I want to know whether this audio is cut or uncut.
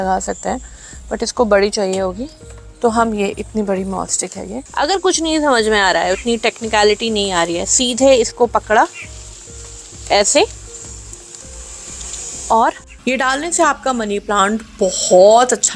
cut